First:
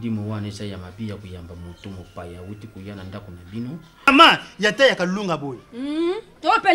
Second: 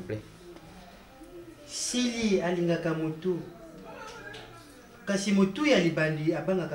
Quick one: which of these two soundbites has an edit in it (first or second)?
first